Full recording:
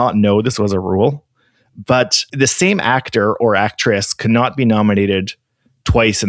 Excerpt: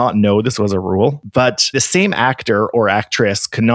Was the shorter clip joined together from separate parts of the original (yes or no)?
yes